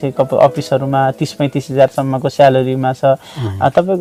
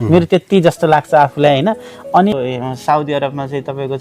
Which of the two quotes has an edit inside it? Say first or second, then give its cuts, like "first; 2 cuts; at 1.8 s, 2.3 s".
second; 1 cut; at 2.3 s